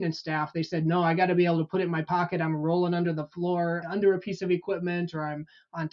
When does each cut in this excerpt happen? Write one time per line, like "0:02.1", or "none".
0:03.8

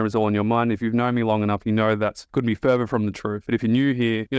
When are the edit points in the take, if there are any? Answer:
0:02.2
0:03.3

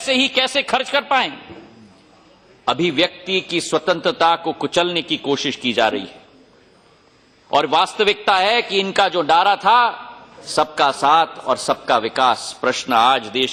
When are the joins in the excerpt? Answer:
none

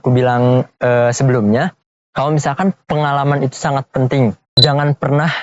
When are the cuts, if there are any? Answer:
0:04.5

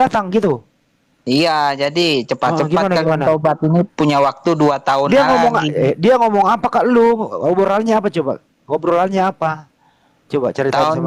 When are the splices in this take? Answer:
none

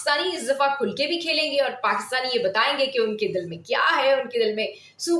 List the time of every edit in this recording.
none

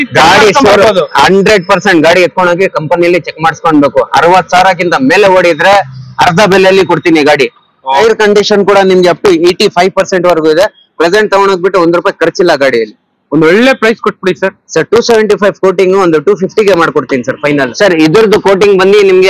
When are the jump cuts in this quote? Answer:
0:08.0
0:17.7

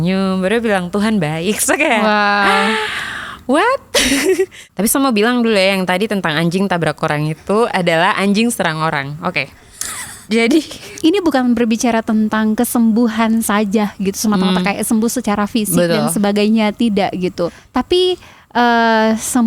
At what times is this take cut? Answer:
0:04.6
0:10.9
0:17.6

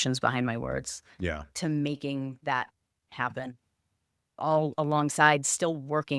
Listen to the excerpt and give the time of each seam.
0:04.4

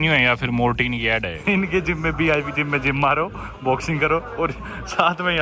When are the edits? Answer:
0:01.3

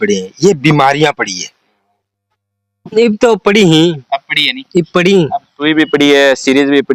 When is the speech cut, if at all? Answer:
0:03.0

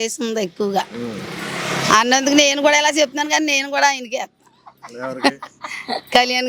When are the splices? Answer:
none

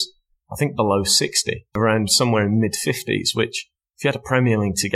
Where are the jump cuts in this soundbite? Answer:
0:01.8

